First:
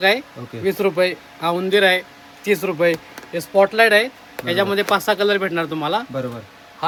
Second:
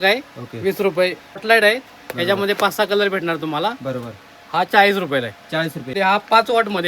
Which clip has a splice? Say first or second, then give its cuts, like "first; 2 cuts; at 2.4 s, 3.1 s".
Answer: second; 2 cuts; at 1.4 s, 5.9 s